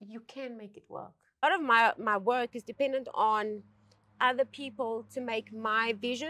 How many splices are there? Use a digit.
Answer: 1